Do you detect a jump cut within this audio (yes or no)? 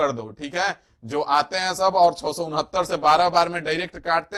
no